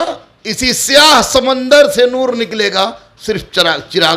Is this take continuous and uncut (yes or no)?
yes